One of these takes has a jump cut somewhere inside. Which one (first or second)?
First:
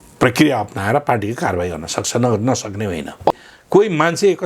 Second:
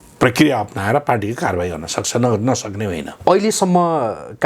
first